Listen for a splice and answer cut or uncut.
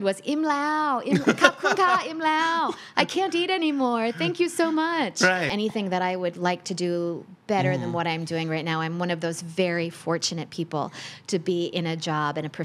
cut